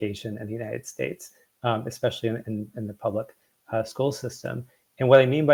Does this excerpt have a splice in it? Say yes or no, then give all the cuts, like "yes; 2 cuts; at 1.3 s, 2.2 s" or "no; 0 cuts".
no; 0 cuts